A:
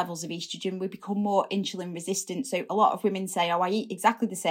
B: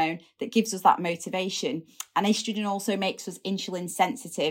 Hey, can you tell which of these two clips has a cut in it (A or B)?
B